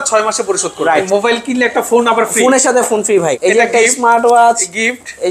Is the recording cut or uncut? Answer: cut